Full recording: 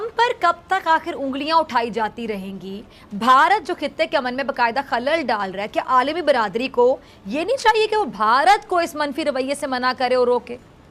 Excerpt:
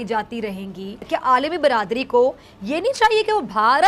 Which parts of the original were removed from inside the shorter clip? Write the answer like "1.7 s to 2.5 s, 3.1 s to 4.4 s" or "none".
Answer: 2.9 s to 5.6 s